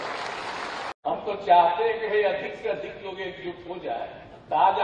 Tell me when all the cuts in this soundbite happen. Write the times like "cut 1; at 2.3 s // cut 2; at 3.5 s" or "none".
cut 1; at 0.9 s